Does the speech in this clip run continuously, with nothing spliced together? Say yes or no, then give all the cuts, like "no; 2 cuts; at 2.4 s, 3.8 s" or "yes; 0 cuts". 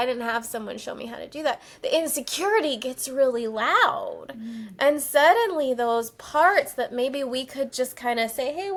yes; 0 cuts